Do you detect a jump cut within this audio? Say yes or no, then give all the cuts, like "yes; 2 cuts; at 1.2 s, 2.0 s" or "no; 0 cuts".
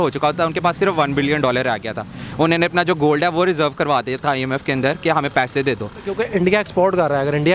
yes; 1 cut; at 6.1 s